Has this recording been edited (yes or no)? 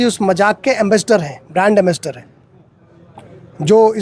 no